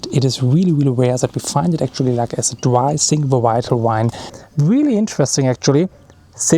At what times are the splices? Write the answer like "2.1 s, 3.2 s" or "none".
4.2 s